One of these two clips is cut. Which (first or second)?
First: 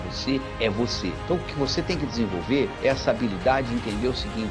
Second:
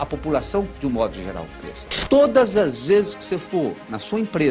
second